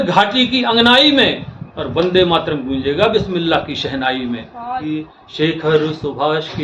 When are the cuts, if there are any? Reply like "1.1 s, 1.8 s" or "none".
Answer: 4.8 s